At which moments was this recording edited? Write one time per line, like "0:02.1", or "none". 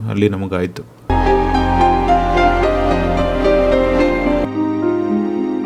0:01.1
0:04.4